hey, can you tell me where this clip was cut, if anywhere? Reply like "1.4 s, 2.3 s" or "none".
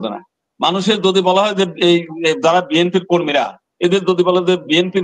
none